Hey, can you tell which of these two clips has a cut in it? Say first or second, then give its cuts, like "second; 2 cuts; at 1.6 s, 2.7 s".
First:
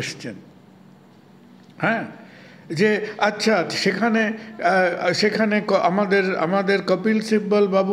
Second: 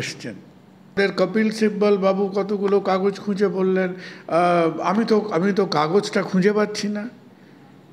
second; 1 cut; at 0.9 s